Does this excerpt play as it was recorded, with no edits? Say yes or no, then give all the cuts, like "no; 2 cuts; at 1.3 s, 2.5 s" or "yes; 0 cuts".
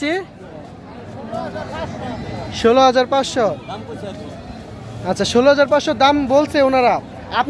yes; 0 cuts